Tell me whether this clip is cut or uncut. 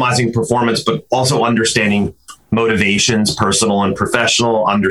uncut